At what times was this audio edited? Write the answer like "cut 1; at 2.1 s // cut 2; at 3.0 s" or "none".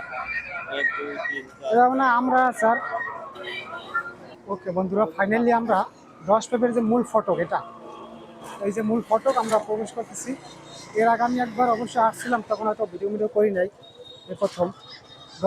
cut 1; at 4.2 s